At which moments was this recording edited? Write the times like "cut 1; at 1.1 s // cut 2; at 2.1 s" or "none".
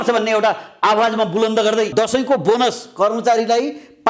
cut 1; at 1.9 s